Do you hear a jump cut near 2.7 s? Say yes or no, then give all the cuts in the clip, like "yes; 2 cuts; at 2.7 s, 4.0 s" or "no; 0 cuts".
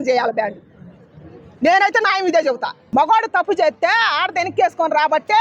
yes; 1 cut; at 2.7 s